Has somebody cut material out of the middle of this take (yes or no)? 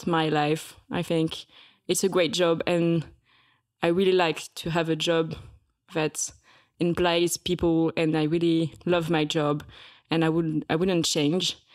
no